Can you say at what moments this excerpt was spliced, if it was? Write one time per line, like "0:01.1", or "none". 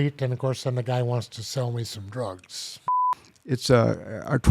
0:03.0